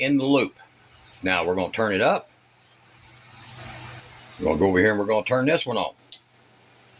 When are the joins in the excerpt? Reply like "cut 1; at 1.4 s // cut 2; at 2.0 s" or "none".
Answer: cut 1; at 4.0 s